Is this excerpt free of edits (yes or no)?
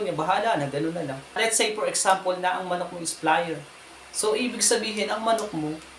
no